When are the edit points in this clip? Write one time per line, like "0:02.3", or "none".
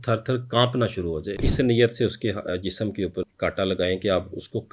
0:01.5
0:03.3